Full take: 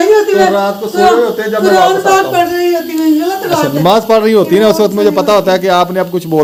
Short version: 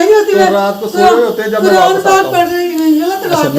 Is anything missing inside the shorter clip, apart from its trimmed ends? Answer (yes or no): yes